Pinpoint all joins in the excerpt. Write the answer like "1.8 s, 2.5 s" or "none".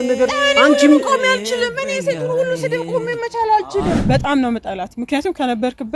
4.0 s

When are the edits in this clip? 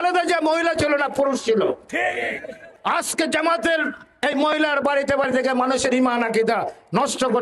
2.7 s

